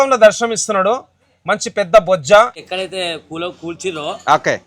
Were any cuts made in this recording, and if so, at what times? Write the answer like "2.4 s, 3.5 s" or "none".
2.6 s

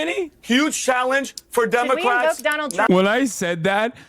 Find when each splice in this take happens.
1.3 s

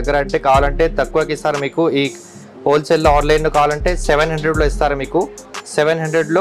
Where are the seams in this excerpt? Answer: none

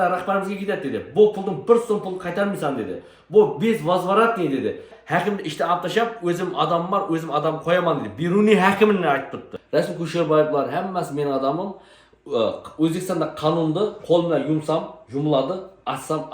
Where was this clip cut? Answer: 5.0 s, 9.6 s

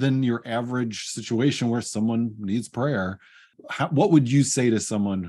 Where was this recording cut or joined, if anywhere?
3.6 s

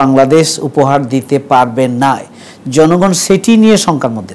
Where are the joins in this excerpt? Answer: none

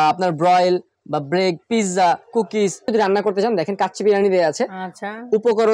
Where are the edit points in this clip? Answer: 2.9 s

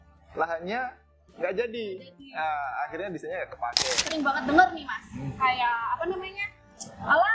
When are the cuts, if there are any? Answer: 4.1 s

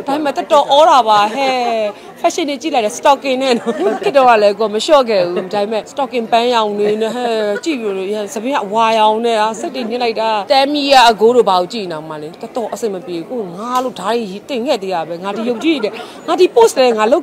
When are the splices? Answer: 4.0 s, 5.9 s, 10.4 s

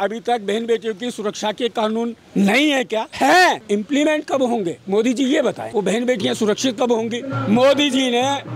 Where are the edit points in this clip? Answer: 2.2 s, 3.1 s, 3.6 s, 5.6 s, 7.3 s

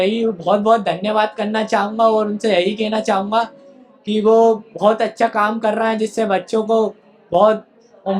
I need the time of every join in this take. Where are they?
none

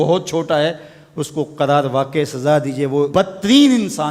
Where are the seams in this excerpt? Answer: 3.1 s

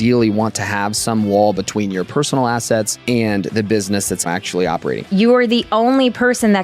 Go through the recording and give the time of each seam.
2.9 s, 4.6 s

